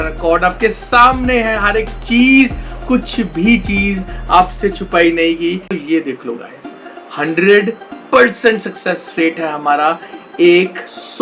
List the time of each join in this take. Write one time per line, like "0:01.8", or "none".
0:05.7